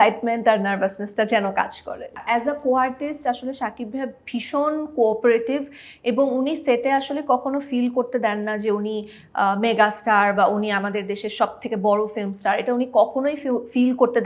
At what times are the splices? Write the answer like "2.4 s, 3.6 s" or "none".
2.1 s